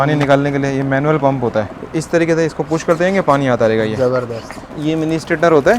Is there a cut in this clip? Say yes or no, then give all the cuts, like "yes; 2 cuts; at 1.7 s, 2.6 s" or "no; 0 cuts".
yes; 2 cuts; at 1.8 s, 4.7 s